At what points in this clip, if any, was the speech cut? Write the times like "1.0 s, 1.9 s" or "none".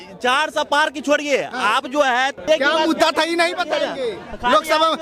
2.4 s